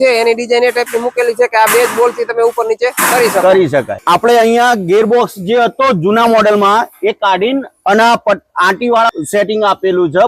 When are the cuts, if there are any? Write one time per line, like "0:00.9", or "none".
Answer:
0:03.9
0:09.3